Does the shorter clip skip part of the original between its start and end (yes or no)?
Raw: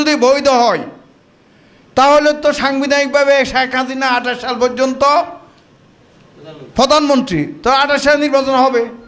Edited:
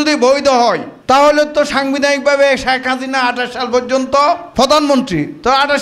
yes